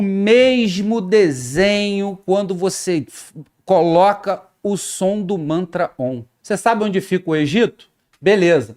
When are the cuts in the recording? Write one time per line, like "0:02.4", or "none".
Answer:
0:06.3